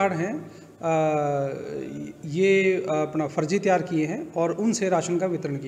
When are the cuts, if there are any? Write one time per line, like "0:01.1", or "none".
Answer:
none